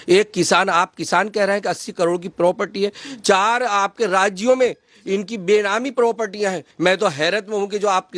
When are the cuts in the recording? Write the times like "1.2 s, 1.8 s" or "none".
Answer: 6.7 s